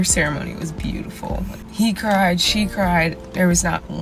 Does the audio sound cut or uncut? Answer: cut